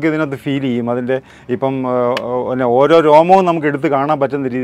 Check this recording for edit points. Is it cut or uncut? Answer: uncut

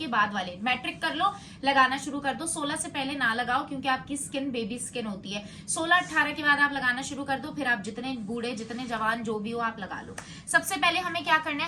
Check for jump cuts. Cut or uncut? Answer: uncut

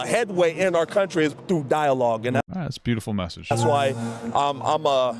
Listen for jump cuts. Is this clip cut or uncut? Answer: uncut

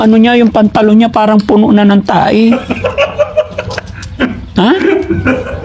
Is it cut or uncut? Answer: uncut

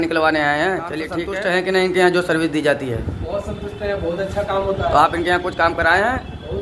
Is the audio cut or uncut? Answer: cut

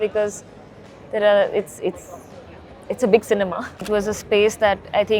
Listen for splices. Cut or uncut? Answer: cut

